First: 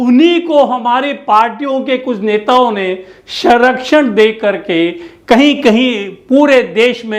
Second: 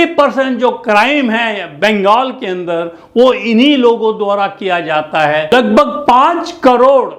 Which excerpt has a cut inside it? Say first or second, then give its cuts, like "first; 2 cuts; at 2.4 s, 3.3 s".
second; 1 cut; at 5.5 s